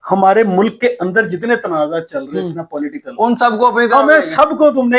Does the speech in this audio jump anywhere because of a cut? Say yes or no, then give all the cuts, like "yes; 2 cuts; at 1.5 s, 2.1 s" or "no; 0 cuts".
no; 0 cuts